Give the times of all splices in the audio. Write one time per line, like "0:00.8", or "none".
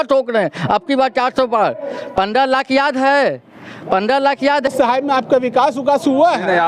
0:04.7